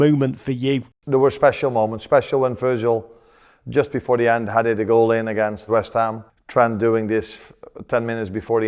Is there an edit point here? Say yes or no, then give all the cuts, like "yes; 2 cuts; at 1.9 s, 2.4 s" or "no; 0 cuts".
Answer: yes; 1 cut; at 1.0 s